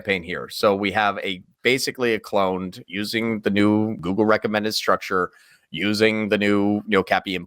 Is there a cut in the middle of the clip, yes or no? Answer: yes